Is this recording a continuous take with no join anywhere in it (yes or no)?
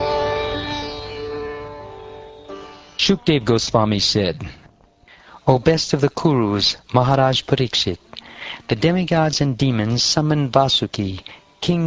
yes